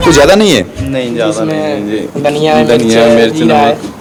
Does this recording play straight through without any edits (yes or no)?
yes